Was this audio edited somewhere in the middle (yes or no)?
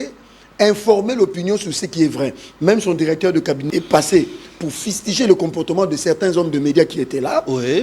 yes